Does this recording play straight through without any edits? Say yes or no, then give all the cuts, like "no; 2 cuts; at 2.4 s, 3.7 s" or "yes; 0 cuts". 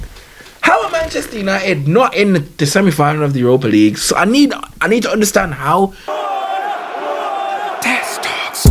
no; 1 cut; at 6.0 s